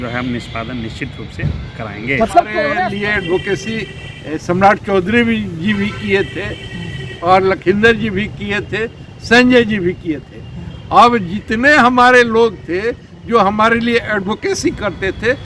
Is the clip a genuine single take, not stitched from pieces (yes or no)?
no